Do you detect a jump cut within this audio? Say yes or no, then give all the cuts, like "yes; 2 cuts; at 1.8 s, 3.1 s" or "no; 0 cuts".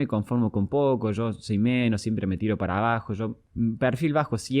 yes; 1 cut; at 3.4 s